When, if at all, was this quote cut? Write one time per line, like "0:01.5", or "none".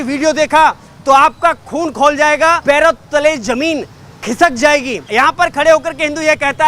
0:02.6
0:05.0